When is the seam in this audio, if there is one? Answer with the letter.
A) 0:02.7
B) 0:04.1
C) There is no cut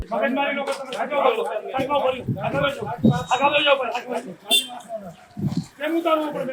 C